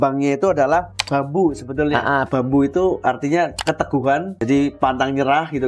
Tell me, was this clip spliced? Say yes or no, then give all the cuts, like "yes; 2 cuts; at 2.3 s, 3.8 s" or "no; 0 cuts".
yes; 3 cuts; at 1.0 s, 2.2 s, 4.3 s